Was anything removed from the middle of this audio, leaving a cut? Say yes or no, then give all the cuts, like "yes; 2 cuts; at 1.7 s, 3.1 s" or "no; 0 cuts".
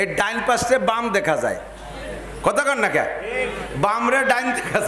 no; 0 cuts